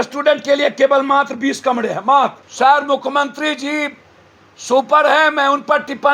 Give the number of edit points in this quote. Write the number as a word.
one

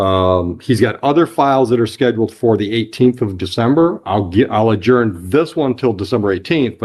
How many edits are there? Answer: zero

